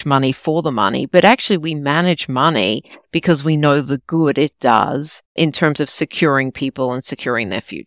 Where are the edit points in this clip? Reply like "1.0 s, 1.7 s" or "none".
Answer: none